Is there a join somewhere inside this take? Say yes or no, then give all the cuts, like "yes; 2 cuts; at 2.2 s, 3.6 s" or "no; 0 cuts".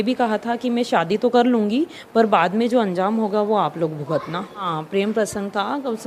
yes; 1 cut; at 4.7 s